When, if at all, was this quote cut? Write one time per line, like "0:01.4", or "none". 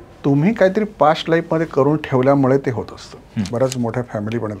0:03.5

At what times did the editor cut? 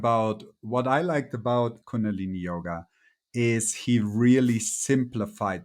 0:01.8

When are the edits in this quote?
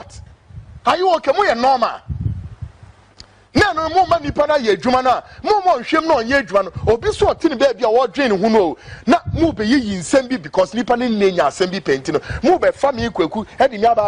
none

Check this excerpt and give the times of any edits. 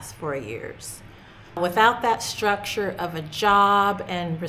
0:01.6

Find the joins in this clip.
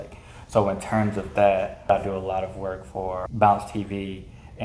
0:01.9
0:03.3

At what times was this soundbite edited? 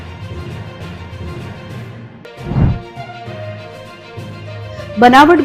0:01.7

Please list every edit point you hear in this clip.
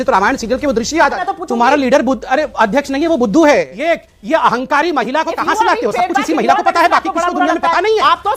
0:01.3
0:03.7

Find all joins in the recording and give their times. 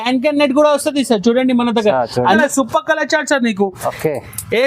0:02.4

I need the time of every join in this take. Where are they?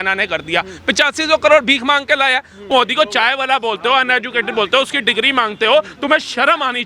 0:02.7

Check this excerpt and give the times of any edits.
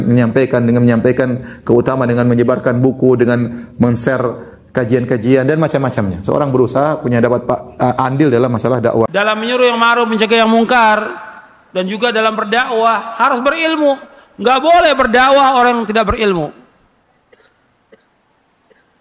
0:09.1

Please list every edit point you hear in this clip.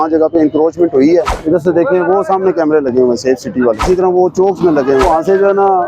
0:01.3
0:03.8
0:05.0

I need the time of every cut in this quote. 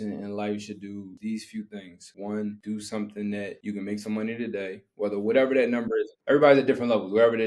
0:01.1
0:02.0
0:02.6
0:03.6
0:06.2

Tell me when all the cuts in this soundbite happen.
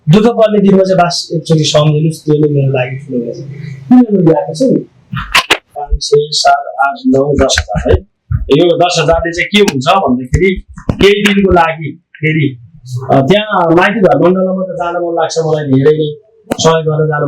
0:06.0

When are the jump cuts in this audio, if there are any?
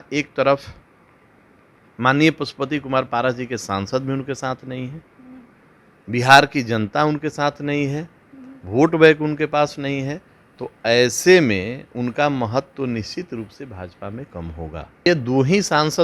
0:15.1

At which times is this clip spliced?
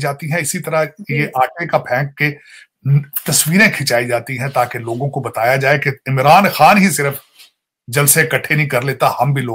none

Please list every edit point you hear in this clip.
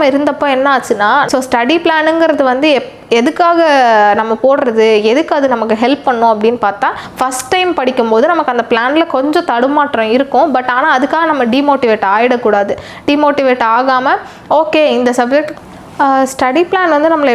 0:01.3
0:07.0
0:15.5

